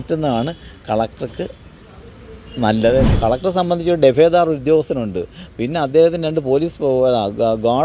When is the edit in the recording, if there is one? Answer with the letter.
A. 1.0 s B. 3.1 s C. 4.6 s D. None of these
B